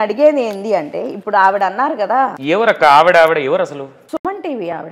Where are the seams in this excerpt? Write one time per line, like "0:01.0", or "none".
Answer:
0:02.4
0:04.0